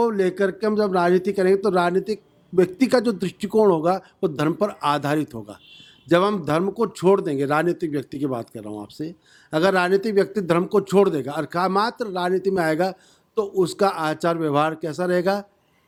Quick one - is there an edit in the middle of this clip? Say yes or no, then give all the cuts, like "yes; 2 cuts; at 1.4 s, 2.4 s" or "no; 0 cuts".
no; 0 cuts